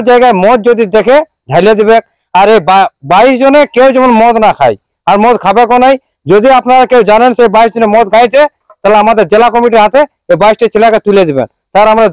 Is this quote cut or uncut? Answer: uncut